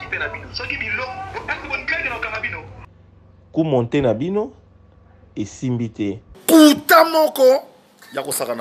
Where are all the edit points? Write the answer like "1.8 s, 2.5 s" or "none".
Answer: 2.6 s

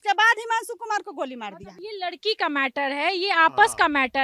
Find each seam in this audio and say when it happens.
1.8 s

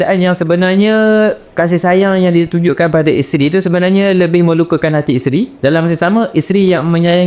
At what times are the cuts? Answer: 1.4 s, 5.5 s

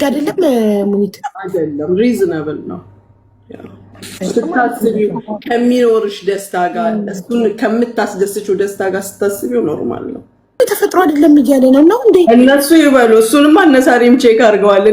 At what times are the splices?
10.6 s

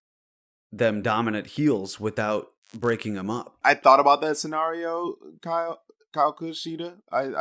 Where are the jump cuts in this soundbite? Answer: 3.5 s

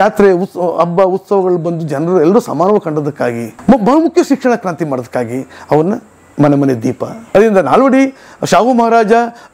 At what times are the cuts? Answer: 3.5 s, 7.1 s

